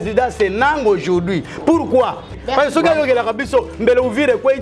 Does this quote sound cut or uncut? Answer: cut